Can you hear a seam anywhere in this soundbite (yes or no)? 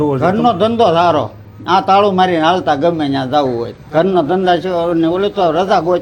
yes